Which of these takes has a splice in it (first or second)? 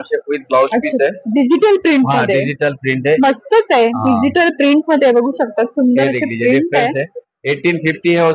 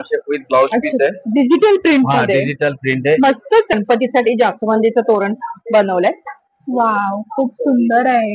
second